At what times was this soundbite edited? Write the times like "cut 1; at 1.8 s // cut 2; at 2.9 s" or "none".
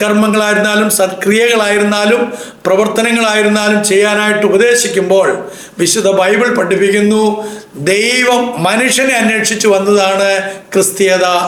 none